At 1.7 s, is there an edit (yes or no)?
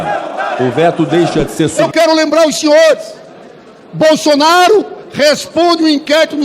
yes